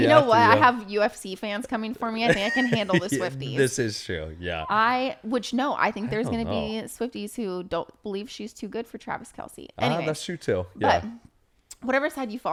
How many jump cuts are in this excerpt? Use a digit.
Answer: 0